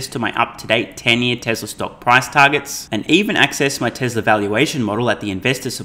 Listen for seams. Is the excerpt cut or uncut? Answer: uncut